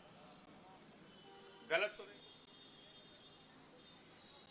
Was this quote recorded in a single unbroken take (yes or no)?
no